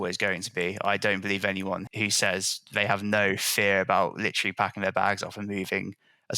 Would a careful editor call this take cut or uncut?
cut